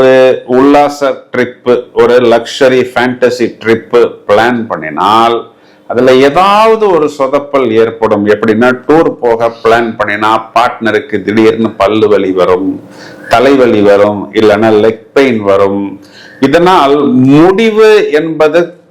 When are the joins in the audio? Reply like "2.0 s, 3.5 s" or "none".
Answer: none